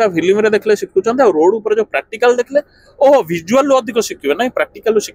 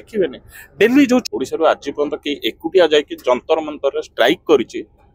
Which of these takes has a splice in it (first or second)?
second